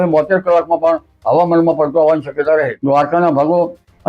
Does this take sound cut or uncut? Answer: cut